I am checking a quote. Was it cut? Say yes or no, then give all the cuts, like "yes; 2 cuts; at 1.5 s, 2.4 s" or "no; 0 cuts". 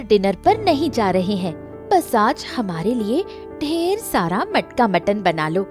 yes; 1 cut; at 1.6 s